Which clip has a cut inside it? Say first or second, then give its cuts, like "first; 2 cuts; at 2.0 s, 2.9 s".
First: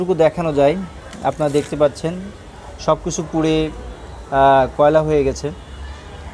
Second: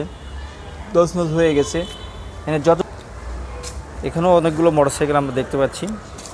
second; 1 cut; at 2.8 s